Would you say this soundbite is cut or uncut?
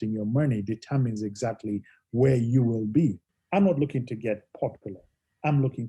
cut